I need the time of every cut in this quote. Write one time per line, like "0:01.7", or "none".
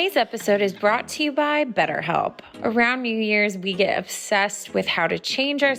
none